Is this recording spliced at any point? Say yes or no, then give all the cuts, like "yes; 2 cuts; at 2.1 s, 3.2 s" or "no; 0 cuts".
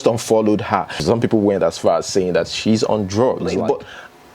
yes; 2 cuts; at 1.0 s, 3.6 s